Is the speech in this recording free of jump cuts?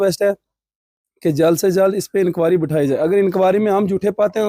yes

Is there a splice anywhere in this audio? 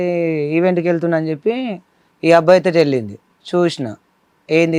no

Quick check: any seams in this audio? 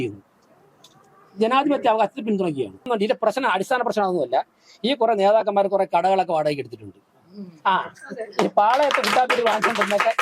yes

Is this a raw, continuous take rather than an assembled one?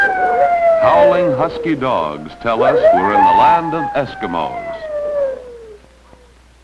yes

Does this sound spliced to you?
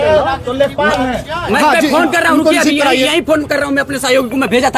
no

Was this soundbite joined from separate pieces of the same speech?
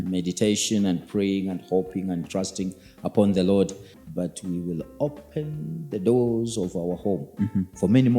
yes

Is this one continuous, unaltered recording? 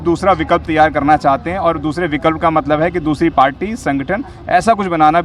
yes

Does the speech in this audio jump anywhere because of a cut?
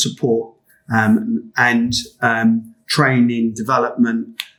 no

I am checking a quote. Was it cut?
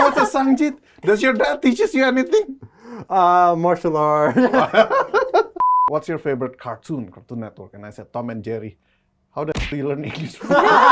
yes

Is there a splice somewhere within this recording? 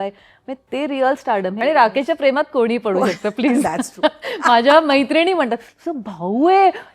yes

